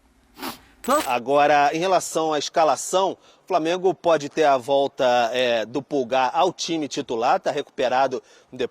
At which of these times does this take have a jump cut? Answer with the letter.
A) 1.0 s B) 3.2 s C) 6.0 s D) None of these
A